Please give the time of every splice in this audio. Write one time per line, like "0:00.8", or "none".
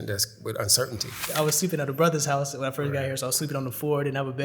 0:01.3